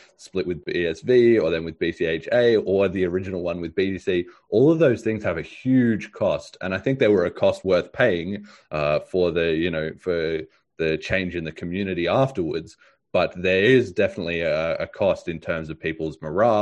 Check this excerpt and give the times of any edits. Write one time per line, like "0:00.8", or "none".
none